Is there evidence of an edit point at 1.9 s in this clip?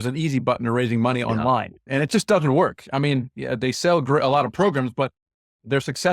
yes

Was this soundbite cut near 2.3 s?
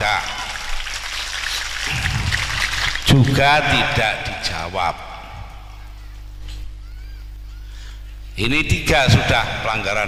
no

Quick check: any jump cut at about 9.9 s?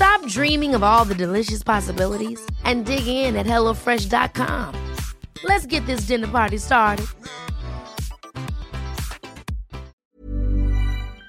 yes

